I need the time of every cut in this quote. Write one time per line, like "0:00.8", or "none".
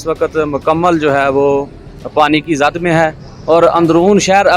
none

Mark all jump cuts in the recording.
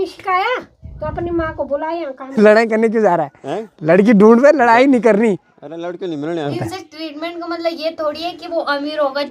0:02.3
0:06.6

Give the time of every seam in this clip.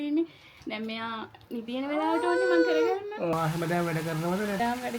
0:03.2

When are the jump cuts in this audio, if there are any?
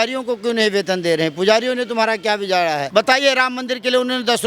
0:02.8

